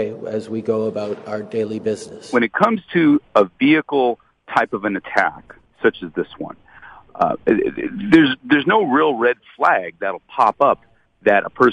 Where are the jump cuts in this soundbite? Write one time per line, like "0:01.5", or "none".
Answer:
0:02.3